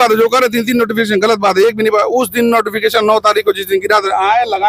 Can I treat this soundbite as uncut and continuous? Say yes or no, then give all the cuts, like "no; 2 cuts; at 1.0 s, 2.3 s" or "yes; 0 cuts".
yes; 0 cuts